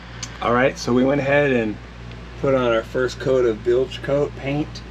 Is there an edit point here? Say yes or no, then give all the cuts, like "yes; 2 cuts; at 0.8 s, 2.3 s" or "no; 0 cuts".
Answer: no; 0 cuts